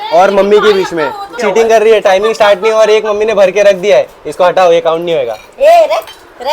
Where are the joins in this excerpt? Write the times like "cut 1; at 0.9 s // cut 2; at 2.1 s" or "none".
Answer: cut 1; at 1.2 s